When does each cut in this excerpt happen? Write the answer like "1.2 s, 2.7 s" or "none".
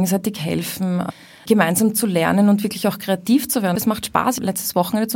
1.1 s, 4.1 s